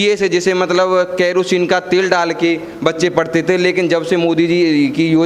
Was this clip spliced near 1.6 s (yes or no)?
no